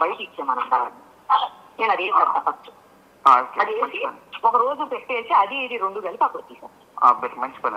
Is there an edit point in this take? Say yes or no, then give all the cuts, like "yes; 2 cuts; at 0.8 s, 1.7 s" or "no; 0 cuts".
no; 0 cuts